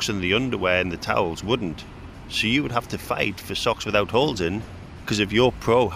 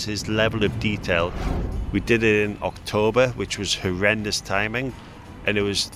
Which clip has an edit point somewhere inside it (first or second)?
second